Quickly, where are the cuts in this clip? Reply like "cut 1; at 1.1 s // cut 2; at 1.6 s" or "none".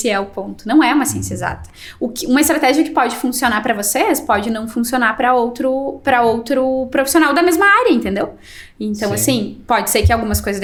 none